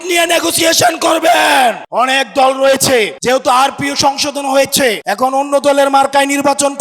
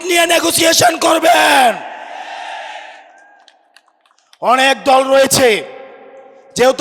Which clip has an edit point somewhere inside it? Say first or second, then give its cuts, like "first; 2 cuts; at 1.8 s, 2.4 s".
first; 3 cuts; at 1.8 s, 3.2 s, 5.0 s